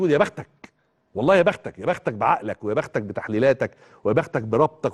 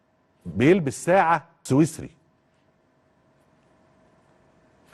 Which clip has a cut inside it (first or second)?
second